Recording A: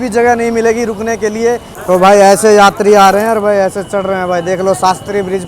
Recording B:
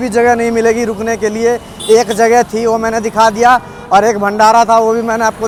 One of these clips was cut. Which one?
A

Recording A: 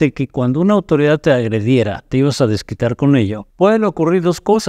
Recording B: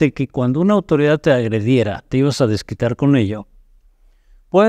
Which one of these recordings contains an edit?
A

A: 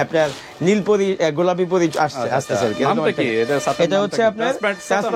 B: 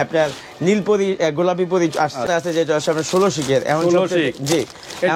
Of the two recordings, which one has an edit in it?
B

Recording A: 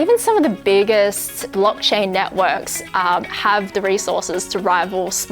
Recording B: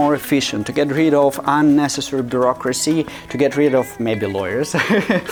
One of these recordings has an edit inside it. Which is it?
A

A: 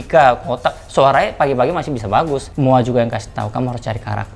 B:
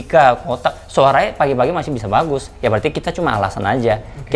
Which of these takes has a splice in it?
A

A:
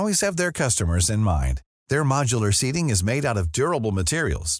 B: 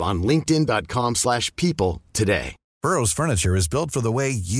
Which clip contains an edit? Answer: B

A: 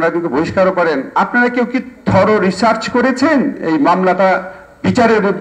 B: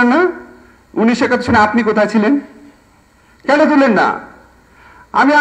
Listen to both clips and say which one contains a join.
A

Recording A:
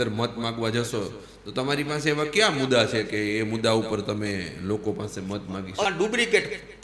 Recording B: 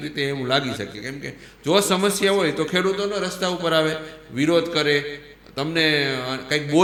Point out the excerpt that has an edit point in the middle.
A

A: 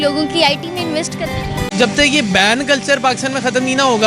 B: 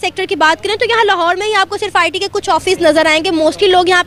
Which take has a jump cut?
A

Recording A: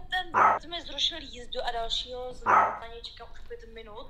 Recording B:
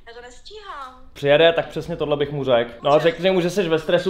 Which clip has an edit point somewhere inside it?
B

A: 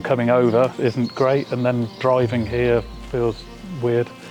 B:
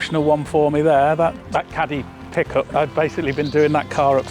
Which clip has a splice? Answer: B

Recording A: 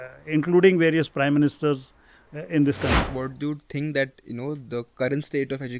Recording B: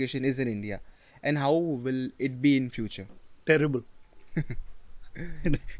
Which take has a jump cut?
A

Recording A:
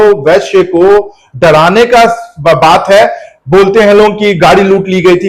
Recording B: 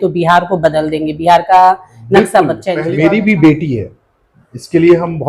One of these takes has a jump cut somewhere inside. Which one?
B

